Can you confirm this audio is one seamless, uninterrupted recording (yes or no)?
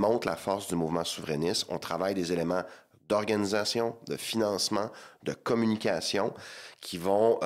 yes